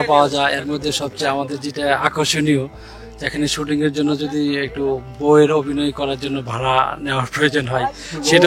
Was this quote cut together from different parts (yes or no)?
no